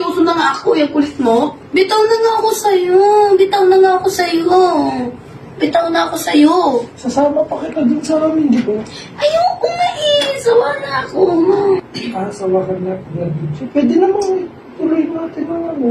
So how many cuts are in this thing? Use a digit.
2